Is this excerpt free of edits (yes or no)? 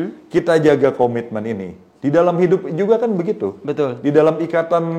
yes